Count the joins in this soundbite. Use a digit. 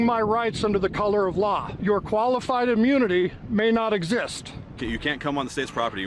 2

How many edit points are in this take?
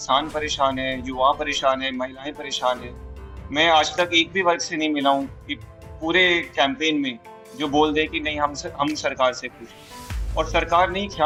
0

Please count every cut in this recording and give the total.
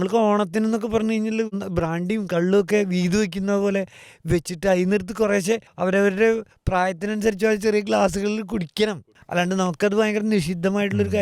4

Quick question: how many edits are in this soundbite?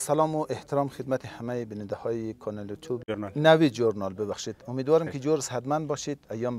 1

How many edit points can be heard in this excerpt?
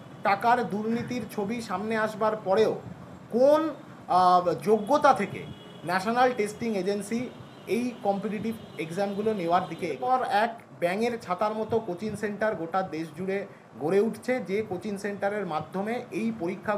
1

